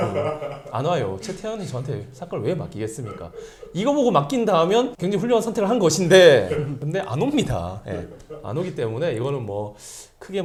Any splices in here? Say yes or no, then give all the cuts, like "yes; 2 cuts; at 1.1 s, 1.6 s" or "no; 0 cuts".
no; 0 cuts